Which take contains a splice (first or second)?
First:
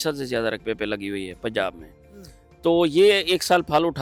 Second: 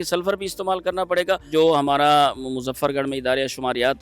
second